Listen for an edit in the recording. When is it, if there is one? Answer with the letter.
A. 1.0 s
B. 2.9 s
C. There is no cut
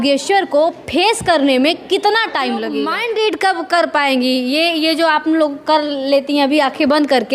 B